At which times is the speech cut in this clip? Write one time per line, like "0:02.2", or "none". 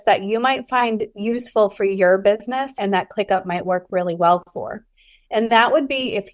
0:02.8